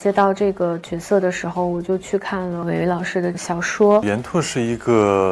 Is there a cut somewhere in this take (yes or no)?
yes